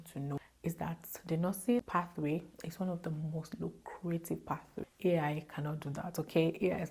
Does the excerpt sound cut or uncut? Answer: cut